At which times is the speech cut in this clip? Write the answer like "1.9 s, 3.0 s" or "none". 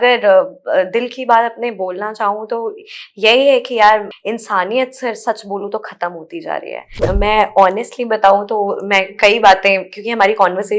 4.1 s, 6.8 s